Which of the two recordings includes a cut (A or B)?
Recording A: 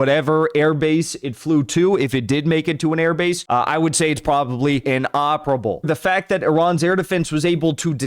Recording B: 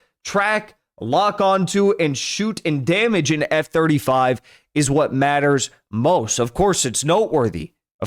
A